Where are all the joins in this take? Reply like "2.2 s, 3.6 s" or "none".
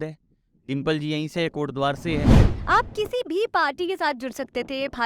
2.5 s